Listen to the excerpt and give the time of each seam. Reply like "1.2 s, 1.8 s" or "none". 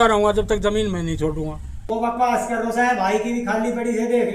1.8 s